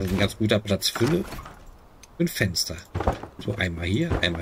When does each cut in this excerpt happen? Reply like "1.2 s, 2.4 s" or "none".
none